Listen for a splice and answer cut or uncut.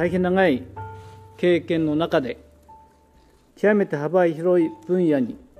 cut